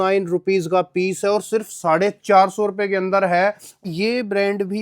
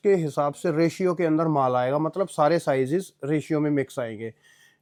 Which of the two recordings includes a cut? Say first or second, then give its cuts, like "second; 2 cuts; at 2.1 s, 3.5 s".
first; 1 cut; at 3.9 s